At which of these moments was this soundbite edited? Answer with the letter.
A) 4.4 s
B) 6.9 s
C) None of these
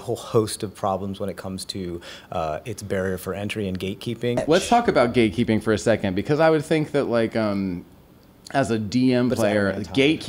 A